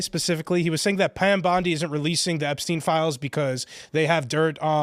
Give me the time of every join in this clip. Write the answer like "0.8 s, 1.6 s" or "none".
none